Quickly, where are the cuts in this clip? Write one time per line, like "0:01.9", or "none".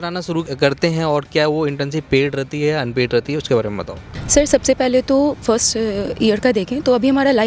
none